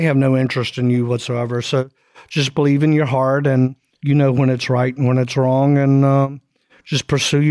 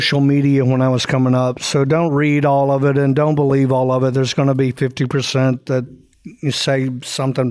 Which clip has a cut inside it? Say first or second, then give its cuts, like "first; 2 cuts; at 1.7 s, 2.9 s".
first; 1 cut; at 3.9 s